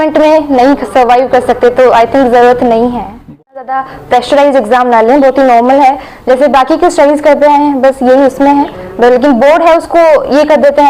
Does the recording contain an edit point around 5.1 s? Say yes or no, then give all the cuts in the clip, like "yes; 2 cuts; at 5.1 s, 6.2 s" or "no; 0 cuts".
no; 1 cut; at 3.6 s